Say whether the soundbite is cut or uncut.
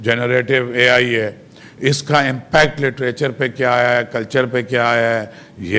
uncut